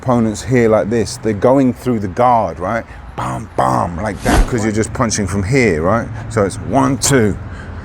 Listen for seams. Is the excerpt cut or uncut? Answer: cut